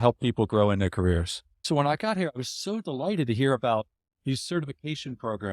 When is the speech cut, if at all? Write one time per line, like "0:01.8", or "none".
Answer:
0:01.7